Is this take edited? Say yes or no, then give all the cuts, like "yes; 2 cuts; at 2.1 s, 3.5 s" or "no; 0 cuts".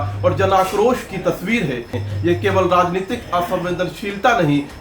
yes; 1 cut; at 1.9 s